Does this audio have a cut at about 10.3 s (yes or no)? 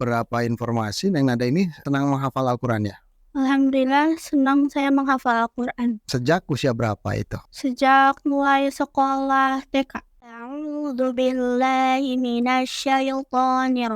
yes